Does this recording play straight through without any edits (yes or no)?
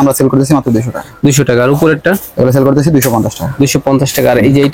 yes